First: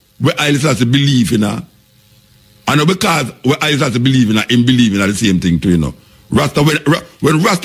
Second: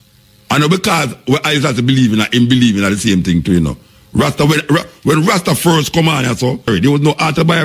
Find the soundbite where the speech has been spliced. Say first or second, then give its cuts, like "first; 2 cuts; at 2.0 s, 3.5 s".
second; 1 cut; at 6.7 s